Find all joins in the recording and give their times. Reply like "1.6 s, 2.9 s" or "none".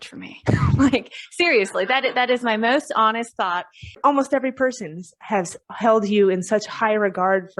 3.9 s